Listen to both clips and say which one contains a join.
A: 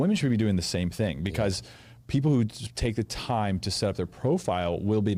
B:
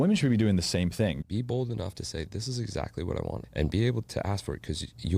B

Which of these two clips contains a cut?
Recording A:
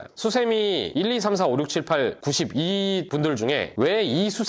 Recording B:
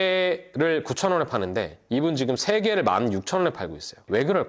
A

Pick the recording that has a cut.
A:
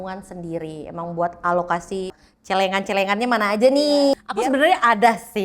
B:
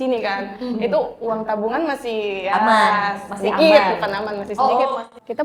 A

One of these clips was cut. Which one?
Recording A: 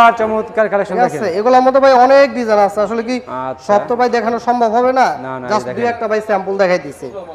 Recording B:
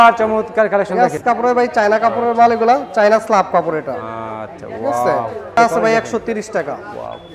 B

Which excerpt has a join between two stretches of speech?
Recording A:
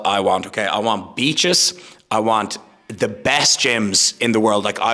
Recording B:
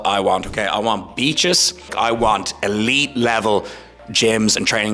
B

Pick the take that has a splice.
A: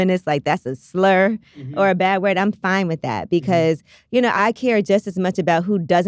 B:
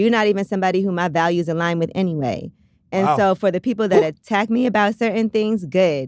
A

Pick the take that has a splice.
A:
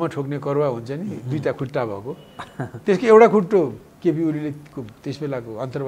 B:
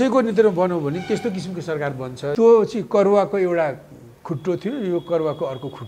B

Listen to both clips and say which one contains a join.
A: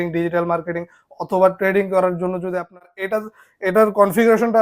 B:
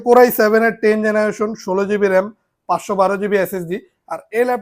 A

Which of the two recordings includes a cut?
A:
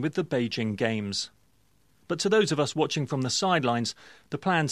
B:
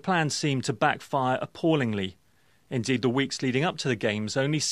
A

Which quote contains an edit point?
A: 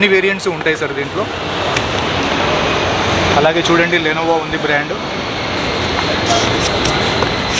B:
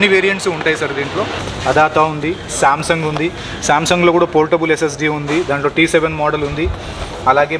B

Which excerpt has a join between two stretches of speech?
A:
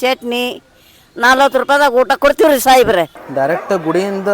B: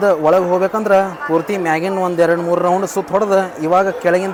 A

